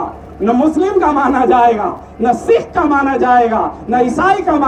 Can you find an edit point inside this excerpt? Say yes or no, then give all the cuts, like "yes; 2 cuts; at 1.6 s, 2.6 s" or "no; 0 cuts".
no; 0 cuts